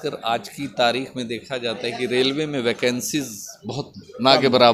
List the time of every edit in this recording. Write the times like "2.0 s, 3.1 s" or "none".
none